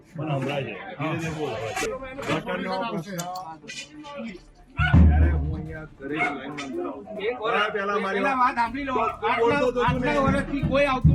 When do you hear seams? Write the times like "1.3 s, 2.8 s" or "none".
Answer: 1.9 s